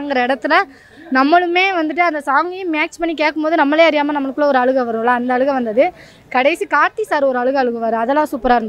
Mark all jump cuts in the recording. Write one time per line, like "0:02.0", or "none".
none